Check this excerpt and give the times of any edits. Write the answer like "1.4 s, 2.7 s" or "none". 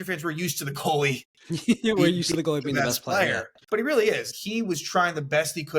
3.5 s, 4.3 s